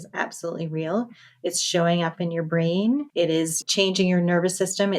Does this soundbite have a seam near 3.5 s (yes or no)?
yes